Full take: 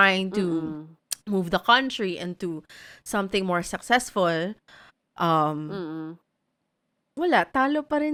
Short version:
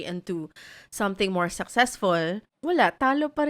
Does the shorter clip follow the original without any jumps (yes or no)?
no